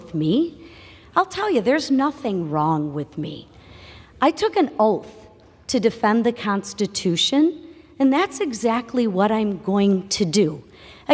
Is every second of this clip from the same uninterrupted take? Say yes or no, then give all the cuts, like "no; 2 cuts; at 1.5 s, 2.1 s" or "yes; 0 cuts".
yes; 0 cuts